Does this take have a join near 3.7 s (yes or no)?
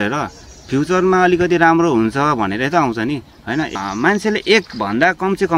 yes